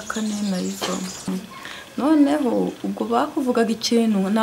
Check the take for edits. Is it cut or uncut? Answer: cut